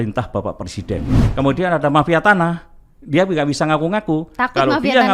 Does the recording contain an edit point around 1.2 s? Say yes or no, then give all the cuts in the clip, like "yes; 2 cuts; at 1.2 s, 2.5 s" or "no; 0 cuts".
yes; 1 cut; at 1.2 s